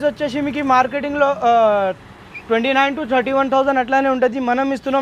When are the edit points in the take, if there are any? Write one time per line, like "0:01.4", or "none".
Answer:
none